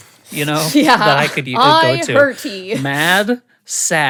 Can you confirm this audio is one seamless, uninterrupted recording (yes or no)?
yes